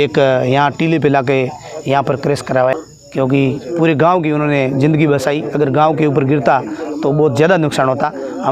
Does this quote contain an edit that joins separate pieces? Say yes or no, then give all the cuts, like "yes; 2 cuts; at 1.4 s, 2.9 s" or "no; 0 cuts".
yes; 1 cut; at 2.7 s